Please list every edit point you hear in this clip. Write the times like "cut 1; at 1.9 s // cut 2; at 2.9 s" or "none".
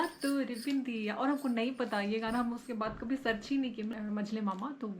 cut 1; at 3.9 s